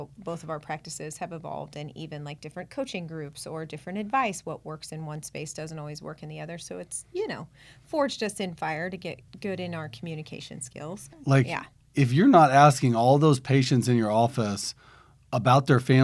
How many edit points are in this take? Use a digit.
1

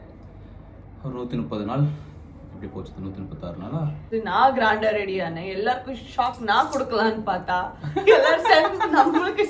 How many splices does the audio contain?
1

